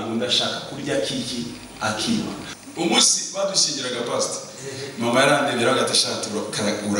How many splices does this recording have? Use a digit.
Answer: 1